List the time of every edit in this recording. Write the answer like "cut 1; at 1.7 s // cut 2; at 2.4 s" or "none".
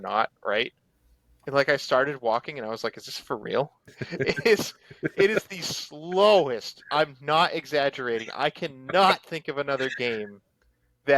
cut 1; at 4.0 s